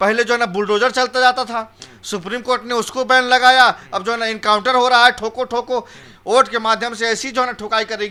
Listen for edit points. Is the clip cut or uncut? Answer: uncut